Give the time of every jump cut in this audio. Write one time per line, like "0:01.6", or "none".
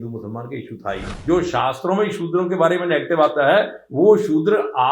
0:01.1